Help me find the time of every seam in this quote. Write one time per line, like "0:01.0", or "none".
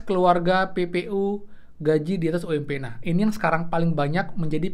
none